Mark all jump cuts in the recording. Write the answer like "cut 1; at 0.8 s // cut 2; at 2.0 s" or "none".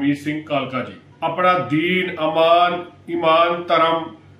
cut 1; at 1.0 s